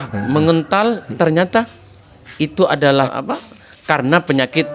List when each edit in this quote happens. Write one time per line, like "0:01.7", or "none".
0:01.1
0:03.1